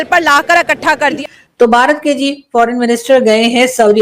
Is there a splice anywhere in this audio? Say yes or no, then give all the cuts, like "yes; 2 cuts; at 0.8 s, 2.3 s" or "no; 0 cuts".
yes; 1 cut; at 1.3 s